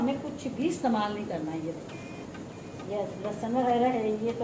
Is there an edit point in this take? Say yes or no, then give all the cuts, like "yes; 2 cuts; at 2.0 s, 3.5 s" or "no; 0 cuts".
no; 0 cuts